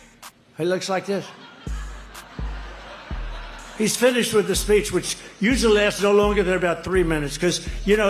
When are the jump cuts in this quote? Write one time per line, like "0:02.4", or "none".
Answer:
none